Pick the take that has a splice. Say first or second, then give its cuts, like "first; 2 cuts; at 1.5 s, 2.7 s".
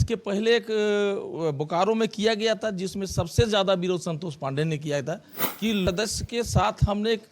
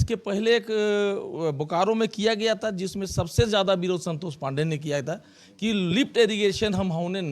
first; 1 cut; at 5.9 s